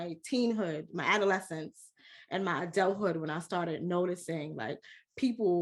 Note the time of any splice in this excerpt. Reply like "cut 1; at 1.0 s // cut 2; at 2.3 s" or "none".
none